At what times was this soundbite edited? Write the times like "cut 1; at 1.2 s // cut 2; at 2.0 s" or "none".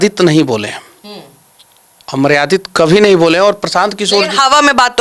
none